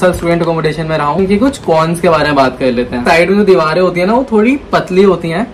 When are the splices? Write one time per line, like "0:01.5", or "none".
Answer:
0:01.2
0:03.0